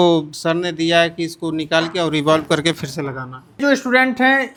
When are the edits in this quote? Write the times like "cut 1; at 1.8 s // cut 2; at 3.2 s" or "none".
none